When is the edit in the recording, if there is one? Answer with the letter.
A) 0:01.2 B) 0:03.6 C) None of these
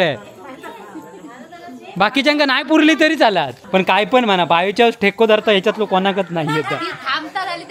B